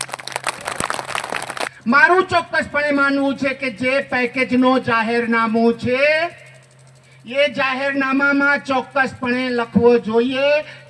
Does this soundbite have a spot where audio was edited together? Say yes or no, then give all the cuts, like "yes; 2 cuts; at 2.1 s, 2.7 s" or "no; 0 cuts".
yes; 1 cut; at 1.7 s